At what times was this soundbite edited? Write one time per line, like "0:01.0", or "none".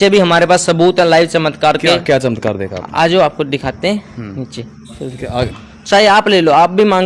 0:05.5